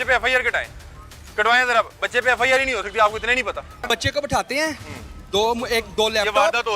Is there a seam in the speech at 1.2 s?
no; 1 cut; at 3.8 s

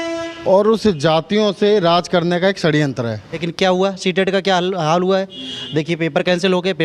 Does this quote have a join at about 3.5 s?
yes; 1 cut; at 3.5 s

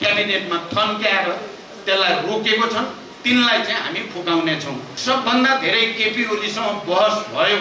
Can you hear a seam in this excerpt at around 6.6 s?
no; 1 cut; at 4.9 s

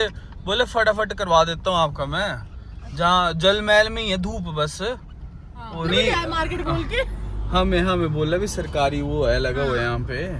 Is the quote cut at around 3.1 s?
no; 1 cut; at 5.9 s

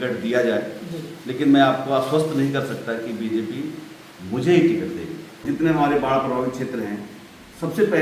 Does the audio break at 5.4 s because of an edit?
yes; 1 cut; at 5.4 s

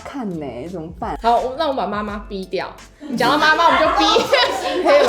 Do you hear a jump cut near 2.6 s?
no; 1 cut; at 1.1 s

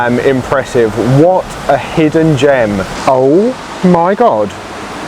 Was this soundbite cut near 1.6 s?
no; 1 cut; at 2.9 s

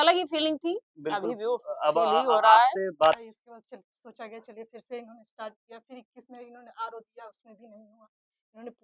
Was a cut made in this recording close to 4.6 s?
no; 1 cut; at 3.2 s

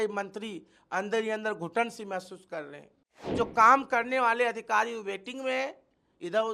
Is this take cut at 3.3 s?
yes; 1 cut; at 3.3 s

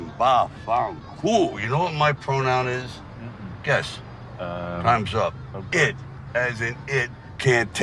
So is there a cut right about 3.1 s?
no; 1 cut; at 1.6 s

